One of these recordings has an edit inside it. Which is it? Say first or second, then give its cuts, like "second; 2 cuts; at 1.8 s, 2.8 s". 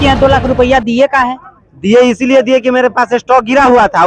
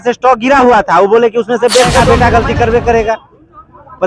second; 1 cut; at 2.0 s